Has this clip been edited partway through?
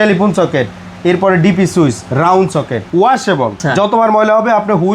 yes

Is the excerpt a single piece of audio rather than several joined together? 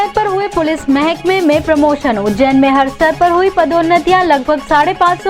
yes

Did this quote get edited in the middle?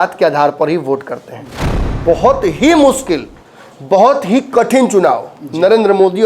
yes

